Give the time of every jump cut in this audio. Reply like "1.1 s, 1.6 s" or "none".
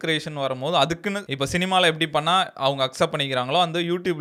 none